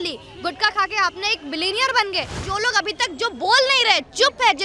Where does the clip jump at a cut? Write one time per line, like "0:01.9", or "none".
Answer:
0:02.4

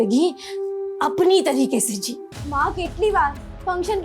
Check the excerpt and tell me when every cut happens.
0:02.3

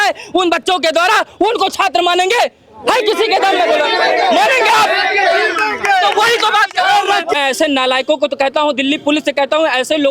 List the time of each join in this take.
0:07.3

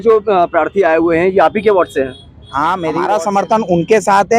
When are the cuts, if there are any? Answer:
0:02.9

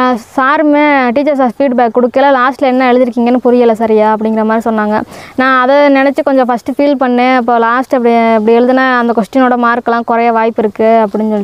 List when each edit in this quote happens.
none

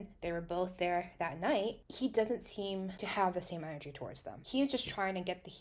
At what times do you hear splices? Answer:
0:04.4

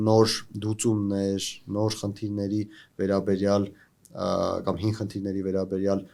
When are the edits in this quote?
none

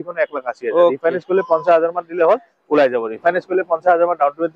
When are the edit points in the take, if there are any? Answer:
0:03.2

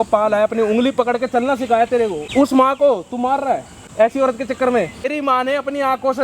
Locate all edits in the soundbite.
0:02.2
0:03.8
0:05.1

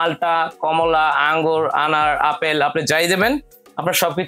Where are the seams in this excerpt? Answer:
none

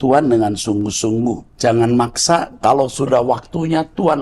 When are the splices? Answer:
0:01.5

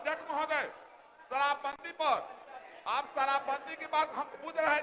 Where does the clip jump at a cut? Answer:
none

